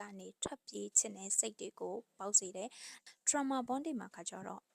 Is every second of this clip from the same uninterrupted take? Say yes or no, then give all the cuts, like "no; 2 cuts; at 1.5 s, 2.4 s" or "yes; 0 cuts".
no; 1 cut; at 2.9 s